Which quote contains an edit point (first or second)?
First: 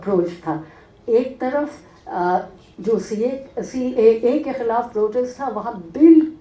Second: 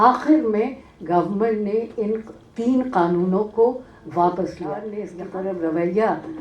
second